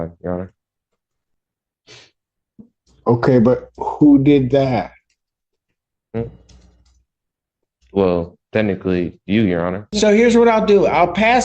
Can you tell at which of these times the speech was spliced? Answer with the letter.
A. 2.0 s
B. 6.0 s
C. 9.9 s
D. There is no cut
C